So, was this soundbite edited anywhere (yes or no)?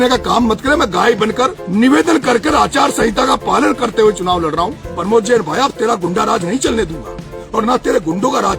yes